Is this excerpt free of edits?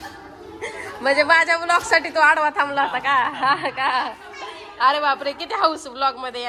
yes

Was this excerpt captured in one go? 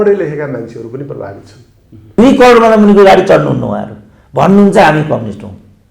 no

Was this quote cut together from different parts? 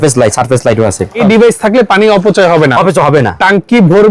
yes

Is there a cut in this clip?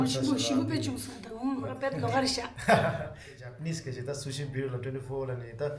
yes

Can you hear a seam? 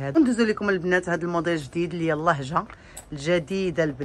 no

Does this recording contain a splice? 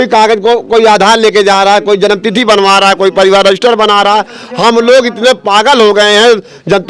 no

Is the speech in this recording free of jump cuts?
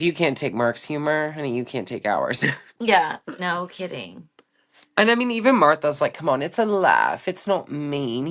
yes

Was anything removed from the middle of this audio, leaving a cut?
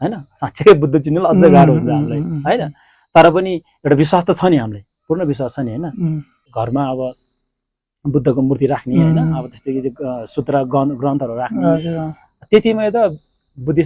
yes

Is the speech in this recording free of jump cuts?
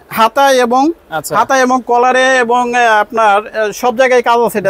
yes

